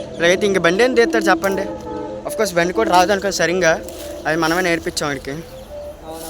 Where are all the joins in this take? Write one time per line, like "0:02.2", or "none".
none